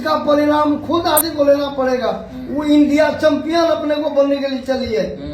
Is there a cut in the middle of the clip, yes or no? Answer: yes